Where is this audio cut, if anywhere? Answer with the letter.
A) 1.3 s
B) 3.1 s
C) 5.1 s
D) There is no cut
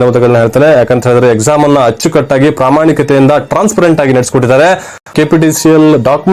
C